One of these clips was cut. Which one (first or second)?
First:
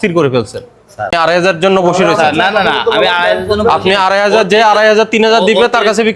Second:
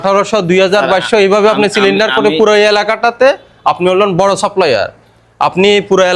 first